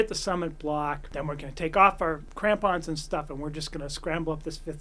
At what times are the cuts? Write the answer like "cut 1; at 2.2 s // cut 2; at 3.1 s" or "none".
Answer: cut 1; at 1.1 s // cut 2; at 2.3 s